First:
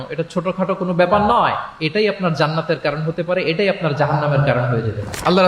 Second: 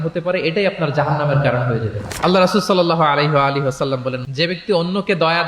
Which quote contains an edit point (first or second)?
second